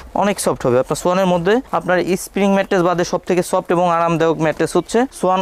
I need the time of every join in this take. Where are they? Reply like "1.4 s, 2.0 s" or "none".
none